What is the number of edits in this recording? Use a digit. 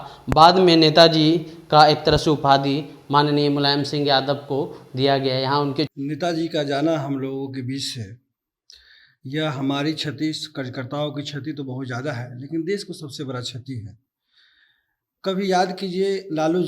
1